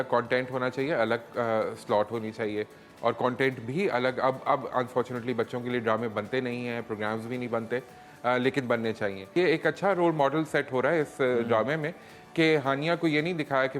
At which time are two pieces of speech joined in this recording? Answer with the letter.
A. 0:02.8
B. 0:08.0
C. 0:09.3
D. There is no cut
C